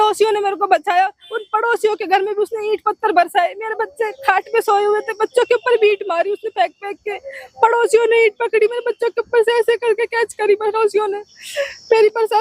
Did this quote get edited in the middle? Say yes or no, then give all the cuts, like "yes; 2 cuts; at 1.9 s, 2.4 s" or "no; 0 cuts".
no; 0 cuts